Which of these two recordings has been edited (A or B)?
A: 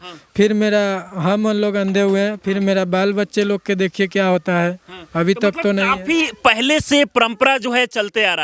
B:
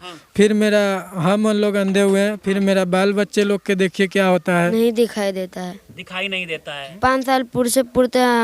B